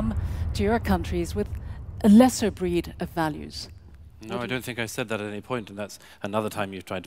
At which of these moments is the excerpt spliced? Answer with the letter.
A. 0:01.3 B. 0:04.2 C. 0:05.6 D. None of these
D